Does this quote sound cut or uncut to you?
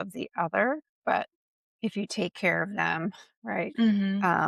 uncut